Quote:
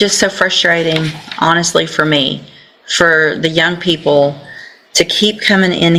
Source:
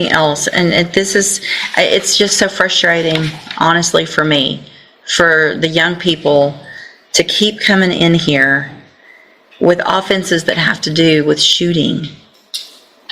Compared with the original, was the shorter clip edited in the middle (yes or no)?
no